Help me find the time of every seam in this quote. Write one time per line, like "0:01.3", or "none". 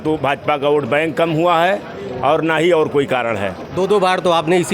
none